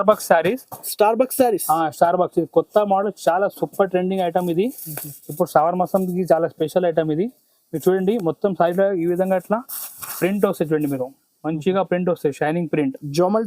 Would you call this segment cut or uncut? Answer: uncut